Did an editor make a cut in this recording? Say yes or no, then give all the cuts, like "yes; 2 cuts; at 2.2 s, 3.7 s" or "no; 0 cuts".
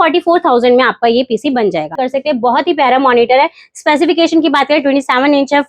yes; 1 cut; at 2.0 s